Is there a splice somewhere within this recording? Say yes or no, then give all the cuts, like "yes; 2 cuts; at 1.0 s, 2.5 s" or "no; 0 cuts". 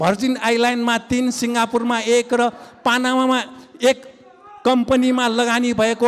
no; 0 cuts